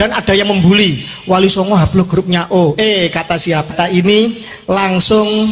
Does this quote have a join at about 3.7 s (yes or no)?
yes